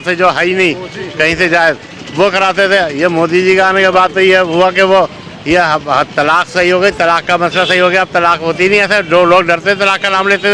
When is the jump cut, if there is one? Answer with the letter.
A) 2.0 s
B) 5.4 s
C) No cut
C